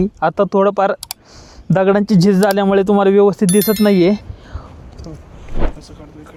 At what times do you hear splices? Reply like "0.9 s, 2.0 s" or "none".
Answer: none